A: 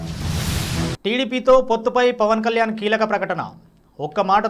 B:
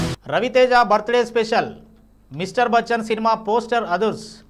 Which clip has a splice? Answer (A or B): A